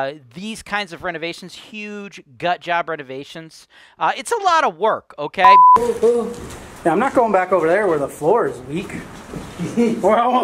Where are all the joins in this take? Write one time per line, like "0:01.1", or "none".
0:05.4